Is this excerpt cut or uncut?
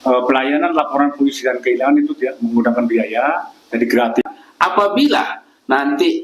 cut